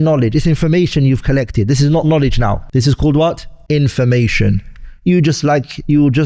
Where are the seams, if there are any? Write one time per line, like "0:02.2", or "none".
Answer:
0:02.6
0:03.5